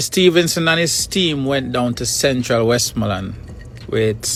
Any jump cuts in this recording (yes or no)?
no